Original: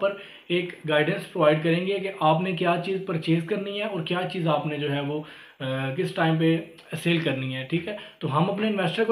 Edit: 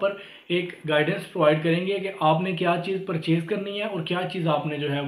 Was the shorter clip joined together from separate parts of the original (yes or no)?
no